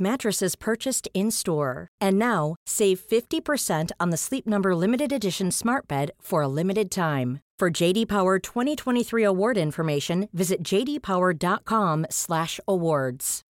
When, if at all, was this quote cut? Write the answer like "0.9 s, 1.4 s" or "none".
none